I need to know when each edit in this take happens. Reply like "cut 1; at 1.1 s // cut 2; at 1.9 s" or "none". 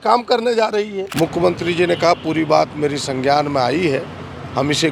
cut 1; at 1.0 s